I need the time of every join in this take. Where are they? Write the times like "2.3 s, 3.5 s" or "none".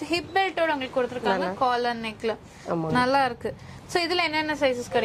none